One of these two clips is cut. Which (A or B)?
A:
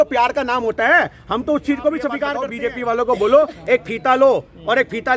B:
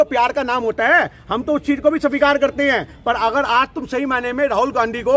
A